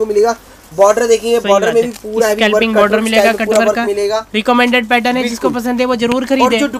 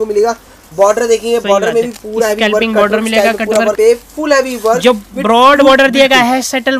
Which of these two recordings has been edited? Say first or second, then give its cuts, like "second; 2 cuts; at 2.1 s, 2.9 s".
second; 1 cut; at 3.7 s